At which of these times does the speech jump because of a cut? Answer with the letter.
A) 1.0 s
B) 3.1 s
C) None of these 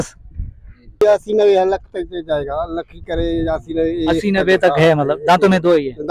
A